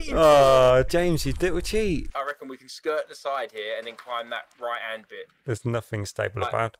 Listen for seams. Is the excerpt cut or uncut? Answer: cut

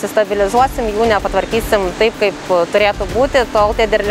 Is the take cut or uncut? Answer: uncut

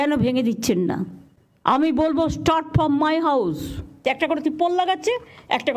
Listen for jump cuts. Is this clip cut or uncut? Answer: cut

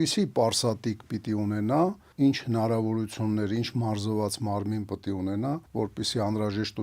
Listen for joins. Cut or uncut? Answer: cut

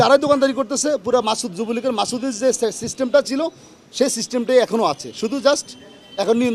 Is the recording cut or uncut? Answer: uncut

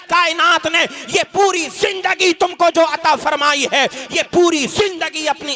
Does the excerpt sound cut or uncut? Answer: uncut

